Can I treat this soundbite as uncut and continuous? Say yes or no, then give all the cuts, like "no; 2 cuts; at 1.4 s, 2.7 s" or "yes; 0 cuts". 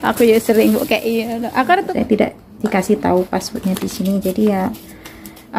no; 1 cut; at 1.9 s